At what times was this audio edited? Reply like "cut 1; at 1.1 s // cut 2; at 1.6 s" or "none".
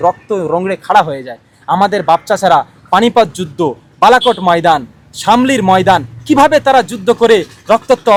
none

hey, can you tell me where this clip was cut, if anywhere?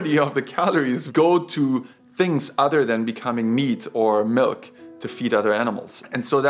cut 1; at 1.0 s

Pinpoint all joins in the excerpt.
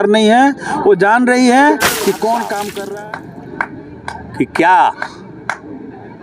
cut 1; at 2.8 s

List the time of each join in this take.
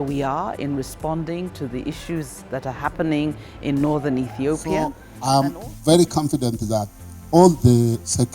cut 1; at 5.1 s

